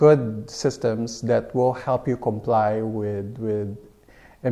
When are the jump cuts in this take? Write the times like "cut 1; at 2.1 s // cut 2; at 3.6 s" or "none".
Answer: none